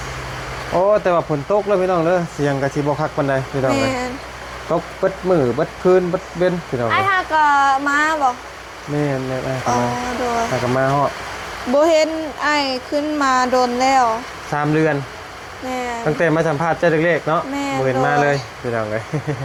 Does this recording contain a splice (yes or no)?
no